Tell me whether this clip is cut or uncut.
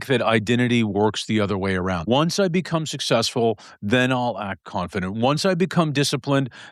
cut